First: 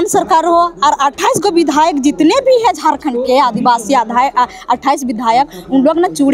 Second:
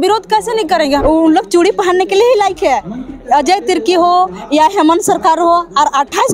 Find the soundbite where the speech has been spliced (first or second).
second